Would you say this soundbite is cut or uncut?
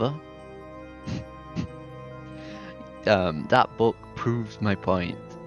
uncut